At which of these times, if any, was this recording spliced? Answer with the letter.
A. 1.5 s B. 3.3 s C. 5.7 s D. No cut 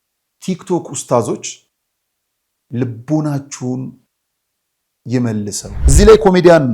C